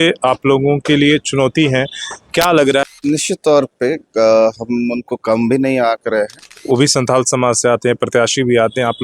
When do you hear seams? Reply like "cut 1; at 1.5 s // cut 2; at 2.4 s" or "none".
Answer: cut 1; at 2.8 s // cut 2; at 6.5 s